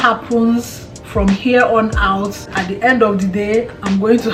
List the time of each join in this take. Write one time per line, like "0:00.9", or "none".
0:02.6